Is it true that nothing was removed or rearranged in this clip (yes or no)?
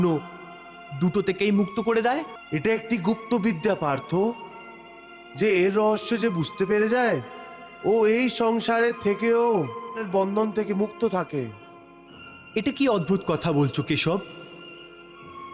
no